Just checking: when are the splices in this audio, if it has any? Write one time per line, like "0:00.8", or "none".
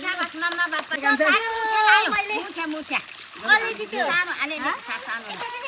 0:01.0

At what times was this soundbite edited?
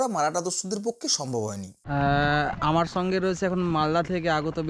0:01.7

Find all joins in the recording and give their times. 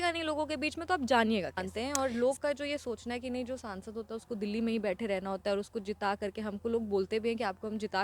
0:01.7

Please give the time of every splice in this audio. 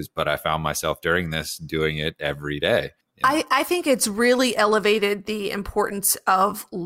0:03.0

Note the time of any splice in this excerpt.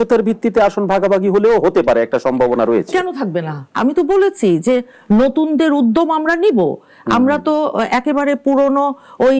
0:03.6

